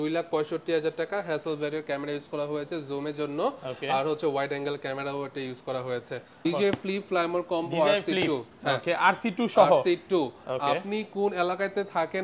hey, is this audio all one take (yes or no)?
no